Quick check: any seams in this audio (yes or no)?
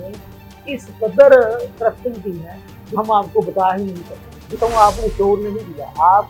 yes